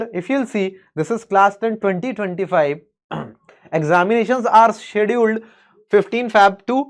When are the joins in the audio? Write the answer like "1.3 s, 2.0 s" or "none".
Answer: none

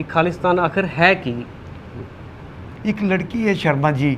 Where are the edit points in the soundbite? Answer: 2.7 s

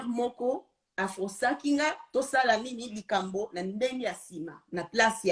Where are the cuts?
none

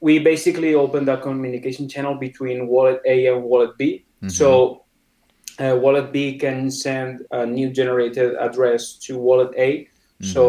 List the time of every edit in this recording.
7.2 s

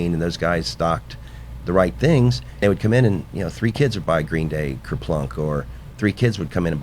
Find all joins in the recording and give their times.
2.6 s

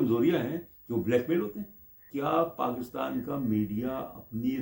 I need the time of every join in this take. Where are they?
2.1 s

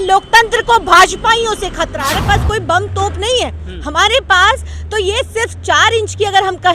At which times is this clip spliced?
1.9 s

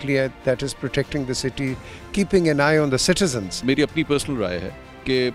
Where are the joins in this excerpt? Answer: 3.6 s

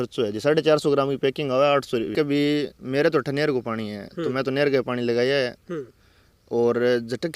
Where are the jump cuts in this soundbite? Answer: 2.1 s

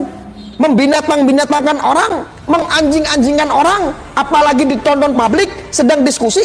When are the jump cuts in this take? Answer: none

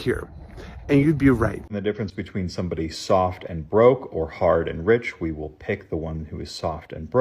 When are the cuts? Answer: 1.8 s

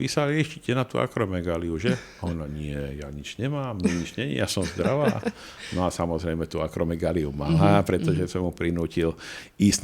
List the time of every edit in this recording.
none

